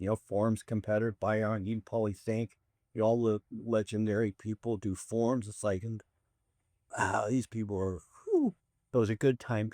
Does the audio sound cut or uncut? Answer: cut